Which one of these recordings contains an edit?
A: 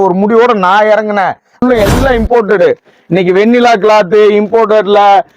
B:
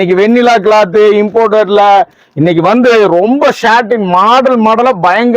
A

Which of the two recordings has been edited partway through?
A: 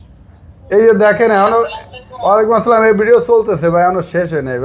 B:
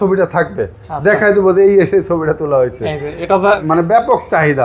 B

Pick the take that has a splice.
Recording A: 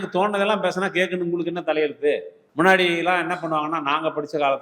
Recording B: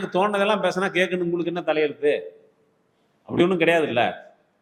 A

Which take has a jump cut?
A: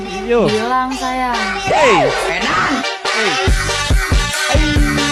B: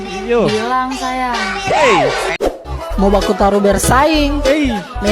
B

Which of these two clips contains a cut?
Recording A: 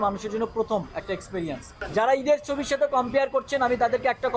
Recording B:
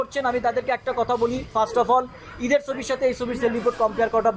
A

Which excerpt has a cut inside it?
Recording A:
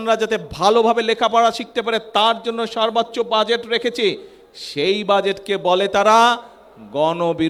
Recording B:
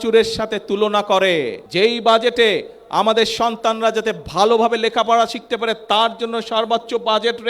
B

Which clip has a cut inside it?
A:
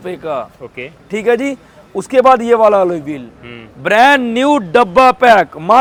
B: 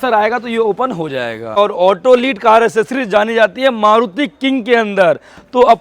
B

